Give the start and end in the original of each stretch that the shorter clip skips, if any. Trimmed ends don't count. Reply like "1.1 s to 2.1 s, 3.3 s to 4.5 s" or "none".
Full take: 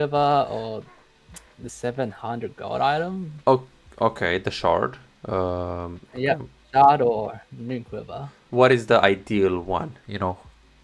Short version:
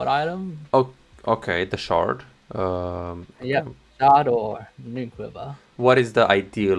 none